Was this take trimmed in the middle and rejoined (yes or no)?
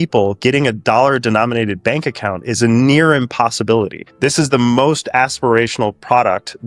no